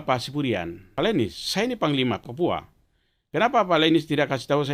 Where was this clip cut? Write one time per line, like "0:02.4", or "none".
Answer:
0:00.9
0:02.2